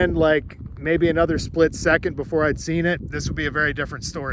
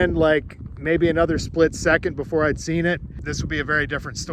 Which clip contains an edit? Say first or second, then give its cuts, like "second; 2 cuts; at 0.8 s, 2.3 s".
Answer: first; 1 cut; at 3.1 s